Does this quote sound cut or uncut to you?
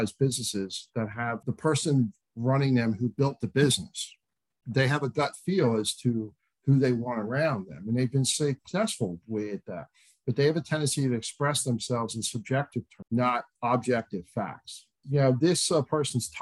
cut